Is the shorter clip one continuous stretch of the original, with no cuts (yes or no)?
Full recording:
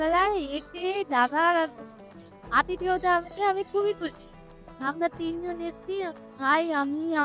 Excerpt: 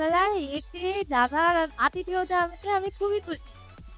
no